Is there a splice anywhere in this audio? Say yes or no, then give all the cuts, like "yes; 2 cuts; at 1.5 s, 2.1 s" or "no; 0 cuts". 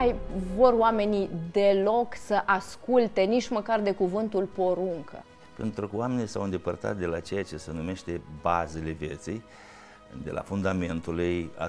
no; 0 cuts